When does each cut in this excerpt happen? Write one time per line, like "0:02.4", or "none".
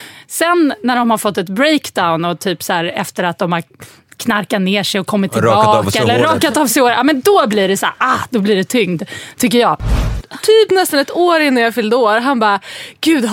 0:10.1